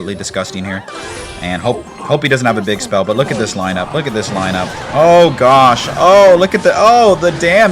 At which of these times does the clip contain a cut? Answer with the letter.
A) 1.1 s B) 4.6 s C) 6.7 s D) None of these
D